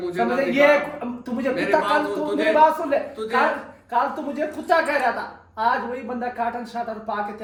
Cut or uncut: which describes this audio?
uncut